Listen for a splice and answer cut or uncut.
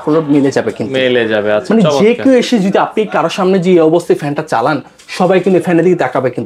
uncut